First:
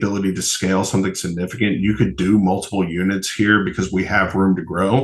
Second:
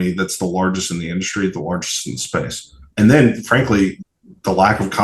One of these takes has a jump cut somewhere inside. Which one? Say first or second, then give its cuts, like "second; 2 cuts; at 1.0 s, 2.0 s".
second; 2 cuts; at 2.9 s, 4.0 s